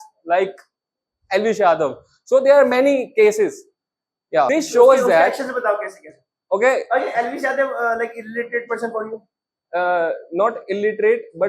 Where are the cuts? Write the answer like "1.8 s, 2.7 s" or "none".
4.5 s